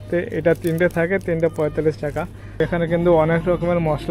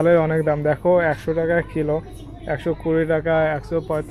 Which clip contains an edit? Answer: first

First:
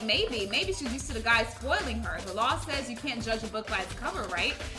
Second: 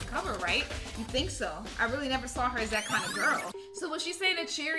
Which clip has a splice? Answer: second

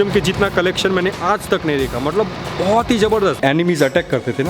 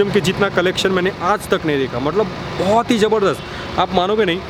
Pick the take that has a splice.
first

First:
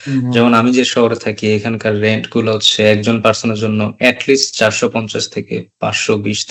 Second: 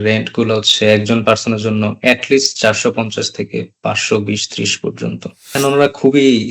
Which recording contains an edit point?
second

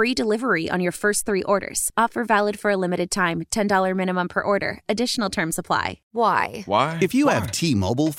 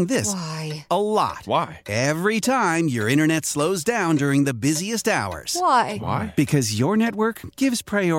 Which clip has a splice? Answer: first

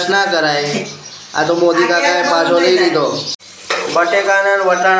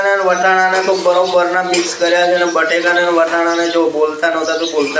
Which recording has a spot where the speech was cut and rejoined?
first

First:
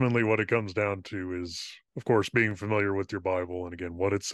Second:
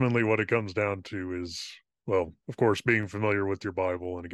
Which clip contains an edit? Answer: first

